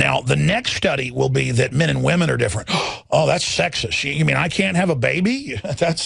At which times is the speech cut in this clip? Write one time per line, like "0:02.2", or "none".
0:04.0